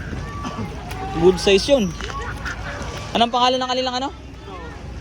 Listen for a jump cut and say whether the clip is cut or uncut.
cut